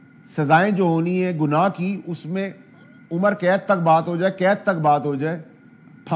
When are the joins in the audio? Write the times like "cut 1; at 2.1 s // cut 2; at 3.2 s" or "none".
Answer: none